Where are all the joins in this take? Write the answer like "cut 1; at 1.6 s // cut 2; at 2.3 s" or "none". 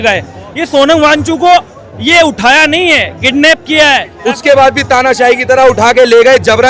cut 1; at 4.1 s